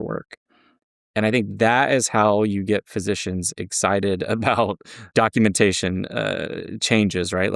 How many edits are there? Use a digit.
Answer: 1